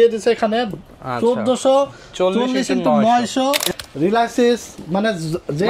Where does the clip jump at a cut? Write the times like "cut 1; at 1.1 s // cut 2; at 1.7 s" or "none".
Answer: cut 1; at 3.6 s